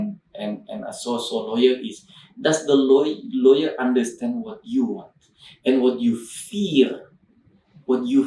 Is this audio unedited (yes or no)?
yes